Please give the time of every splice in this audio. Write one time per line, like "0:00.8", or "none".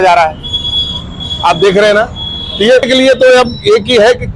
0:02.9